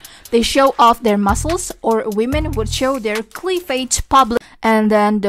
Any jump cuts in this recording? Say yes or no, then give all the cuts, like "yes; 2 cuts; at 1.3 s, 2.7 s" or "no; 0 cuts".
yes; 1 cut; at 4.4 s